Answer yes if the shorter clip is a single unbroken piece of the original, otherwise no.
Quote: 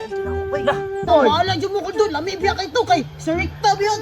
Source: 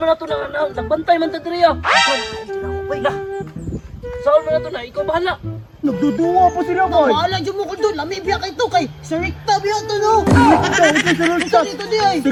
no